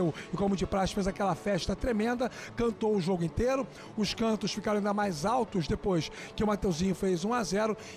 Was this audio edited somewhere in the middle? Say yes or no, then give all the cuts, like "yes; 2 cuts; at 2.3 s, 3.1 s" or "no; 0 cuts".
no; 0 cuts